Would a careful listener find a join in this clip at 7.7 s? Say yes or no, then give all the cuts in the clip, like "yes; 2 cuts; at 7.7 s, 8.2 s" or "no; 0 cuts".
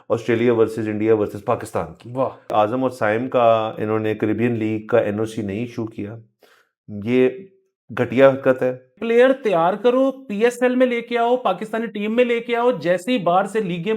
no; 2 cuts; at 2.5 s, 8.9 s